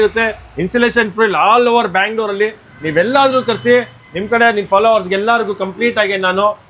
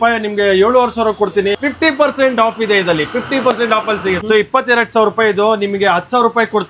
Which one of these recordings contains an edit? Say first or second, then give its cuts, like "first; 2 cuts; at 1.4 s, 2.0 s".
second; 2 cuts; at 1.6 s, 4.2 s